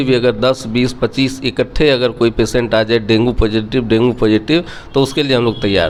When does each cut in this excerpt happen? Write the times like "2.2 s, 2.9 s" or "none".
none